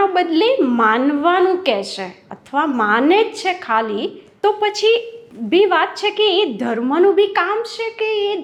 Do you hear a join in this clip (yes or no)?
no